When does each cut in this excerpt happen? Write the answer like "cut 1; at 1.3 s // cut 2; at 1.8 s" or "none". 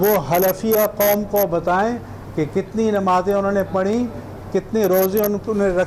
none